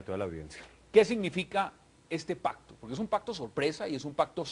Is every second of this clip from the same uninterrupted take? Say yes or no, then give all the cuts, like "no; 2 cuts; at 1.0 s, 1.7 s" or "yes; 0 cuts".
no; 1 cut; at 1.8 s